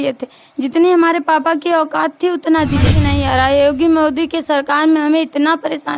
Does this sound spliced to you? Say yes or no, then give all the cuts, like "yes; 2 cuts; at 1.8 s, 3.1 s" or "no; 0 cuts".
yes; 1 cut; at 3.0 s